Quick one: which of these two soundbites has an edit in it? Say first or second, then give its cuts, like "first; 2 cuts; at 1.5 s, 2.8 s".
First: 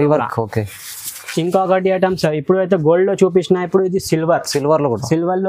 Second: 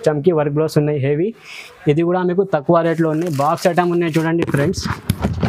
first; 1 cut; at 1.2 s